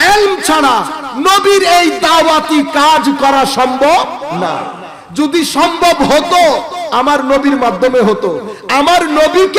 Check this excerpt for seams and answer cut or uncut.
uncut